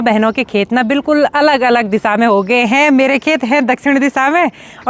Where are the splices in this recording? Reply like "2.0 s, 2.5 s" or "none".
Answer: none